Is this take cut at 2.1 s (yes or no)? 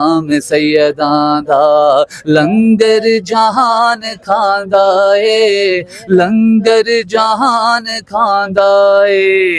no